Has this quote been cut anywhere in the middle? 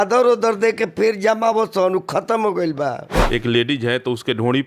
yes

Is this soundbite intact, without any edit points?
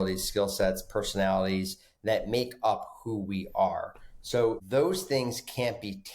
no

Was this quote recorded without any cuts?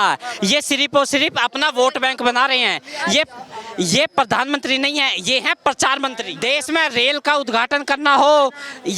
no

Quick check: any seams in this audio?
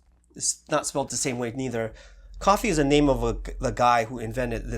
yes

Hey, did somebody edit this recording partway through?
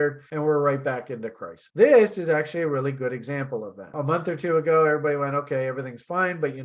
yes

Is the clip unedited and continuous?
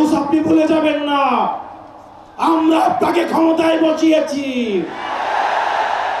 yes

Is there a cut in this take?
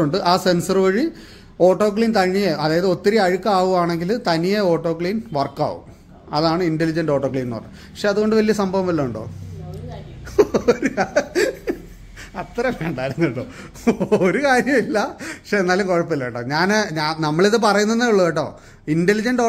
no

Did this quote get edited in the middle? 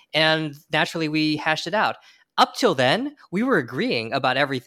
no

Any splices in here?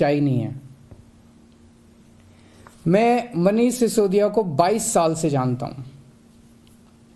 no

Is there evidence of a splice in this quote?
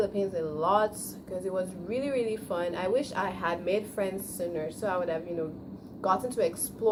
no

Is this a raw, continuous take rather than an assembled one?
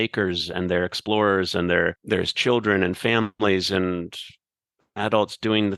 no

